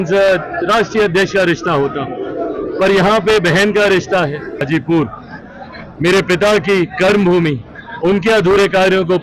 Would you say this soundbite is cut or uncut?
cut